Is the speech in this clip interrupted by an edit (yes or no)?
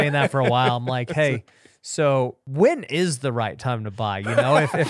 yes